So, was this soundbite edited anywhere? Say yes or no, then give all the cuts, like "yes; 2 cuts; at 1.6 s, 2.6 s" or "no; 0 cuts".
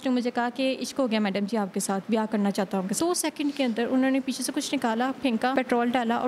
yes; 2 cuts; at 3.0 s, 5.5 s